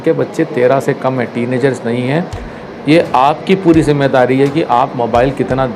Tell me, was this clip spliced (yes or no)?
no